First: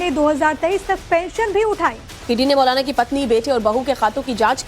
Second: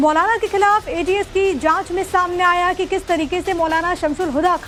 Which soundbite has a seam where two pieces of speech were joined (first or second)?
first